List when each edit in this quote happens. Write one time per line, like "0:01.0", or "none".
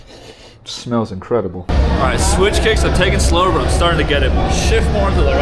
0:01.6